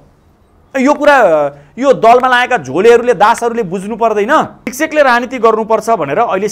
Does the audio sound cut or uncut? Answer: cut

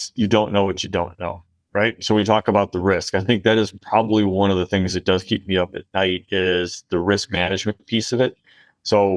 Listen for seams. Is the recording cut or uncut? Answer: uncut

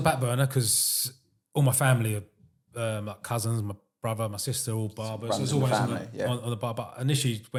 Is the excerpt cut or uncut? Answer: uncut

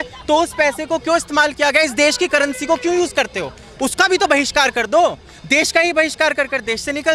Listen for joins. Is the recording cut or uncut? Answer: uncut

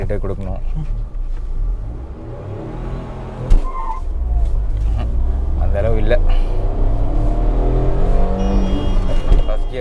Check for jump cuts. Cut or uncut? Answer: uncut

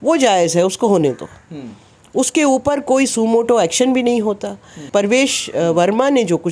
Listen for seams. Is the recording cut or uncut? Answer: uncut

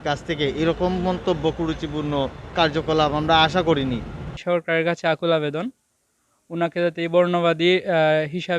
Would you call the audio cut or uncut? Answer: cut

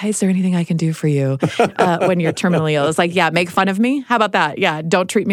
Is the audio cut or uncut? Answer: uncut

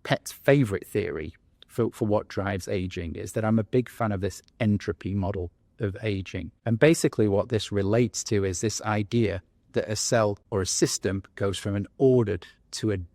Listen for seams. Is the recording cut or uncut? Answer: cut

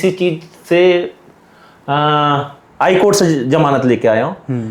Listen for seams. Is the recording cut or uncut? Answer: uncut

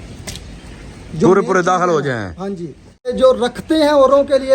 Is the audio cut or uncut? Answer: cut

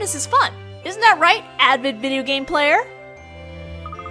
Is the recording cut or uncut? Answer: uncut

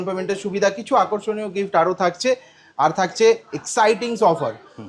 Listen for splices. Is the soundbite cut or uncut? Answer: uncut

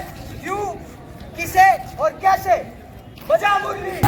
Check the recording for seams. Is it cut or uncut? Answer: uncut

